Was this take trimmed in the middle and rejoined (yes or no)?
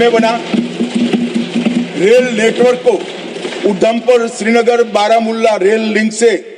no